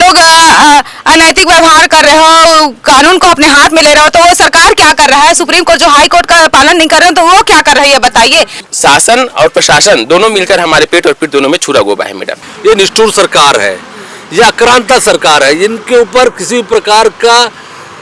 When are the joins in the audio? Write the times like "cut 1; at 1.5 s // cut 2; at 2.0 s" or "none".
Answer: cut 1; at 8.6 s // cut 2; at 12.4 s